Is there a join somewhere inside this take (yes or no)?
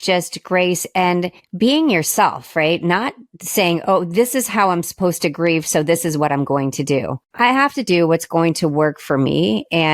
yes